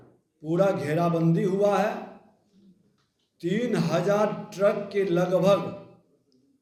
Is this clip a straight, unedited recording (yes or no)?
yes